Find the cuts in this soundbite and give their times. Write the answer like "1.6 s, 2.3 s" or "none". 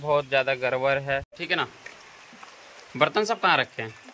1.3 s